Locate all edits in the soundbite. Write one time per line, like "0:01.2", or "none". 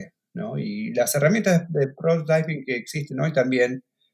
none